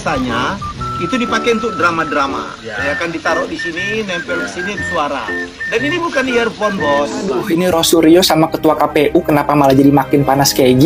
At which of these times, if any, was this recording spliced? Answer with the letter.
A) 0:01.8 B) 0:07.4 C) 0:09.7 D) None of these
B